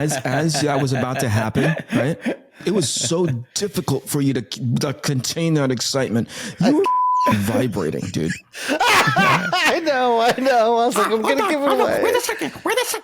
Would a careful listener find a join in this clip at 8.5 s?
no; 1 cut; at 2.5 s

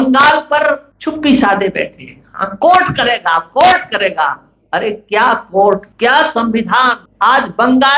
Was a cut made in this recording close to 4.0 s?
no; 3 cuts; at 0.9 s, 5.9 s, 7.0 s

